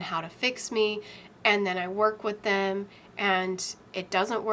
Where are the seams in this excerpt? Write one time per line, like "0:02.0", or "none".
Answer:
none